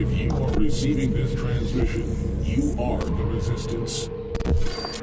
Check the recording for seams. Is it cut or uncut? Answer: uncut